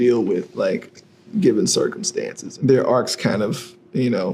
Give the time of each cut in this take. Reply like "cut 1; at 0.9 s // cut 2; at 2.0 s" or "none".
cut 1; at 2.4 s